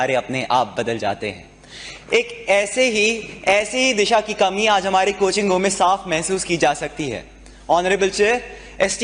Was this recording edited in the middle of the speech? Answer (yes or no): no